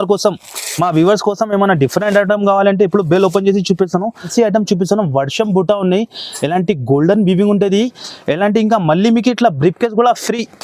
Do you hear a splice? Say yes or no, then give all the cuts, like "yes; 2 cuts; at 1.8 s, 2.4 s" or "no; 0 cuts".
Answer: yes; 1 cut; at 4.2 s